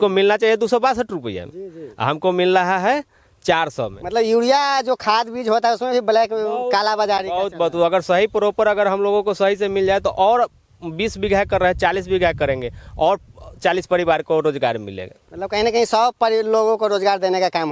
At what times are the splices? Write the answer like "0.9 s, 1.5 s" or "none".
none